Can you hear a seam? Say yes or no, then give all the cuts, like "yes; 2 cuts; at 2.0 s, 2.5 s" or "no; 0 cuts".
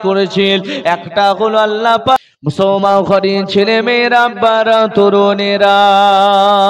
yes; 1 cut; at 2.2 s